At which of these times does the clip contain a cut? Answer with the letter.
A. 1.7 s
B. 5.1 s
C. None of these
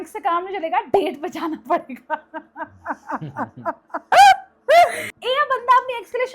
B